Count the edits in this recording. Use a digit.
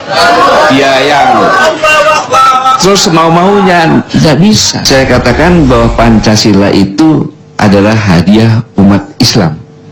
1